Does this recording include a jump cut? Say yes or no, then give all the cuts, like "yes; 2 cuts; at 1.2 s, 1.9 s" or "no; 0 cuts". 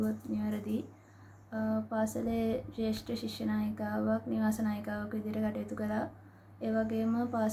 no; 0 cuts